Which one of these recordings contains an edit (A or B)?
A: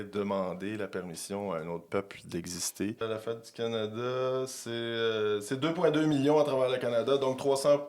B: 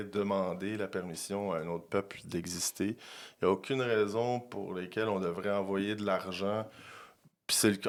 A